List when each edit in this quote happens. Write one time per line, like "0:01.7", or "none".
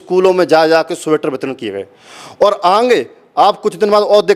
none